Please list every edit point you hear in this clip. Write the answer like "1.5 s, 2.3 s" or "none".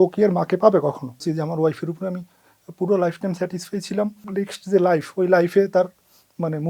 1.2 s, 4.2 s

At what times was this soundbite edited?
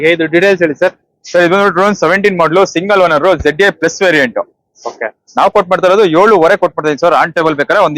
none

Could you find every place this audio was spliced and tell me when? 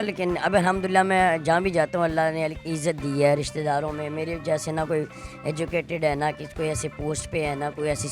none

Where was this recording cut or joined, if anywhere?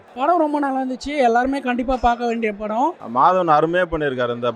3.0 s

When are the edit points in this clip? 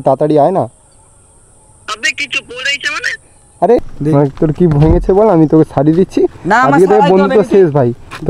3.8 s

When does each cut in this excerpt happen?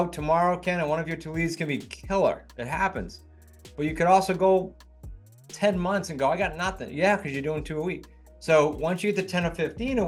none

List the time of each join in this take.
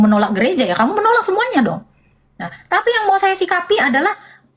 none

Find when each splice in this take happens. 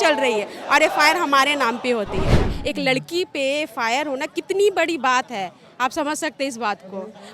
2.5 s

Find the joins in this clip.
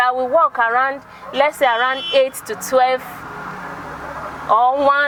none

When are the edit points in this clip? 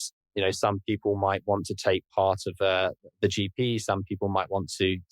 none

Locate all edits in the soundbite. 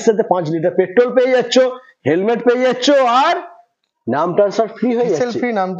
none

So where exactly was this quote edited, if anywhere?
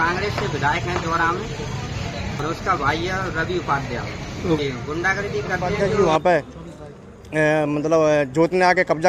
2.4 s, 5.8 s

